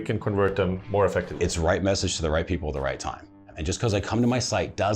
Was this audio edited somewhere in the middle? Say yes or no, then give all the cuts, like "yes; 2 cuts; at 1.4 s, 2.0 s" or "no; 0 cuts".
yes; 1 cut; at 3.4 s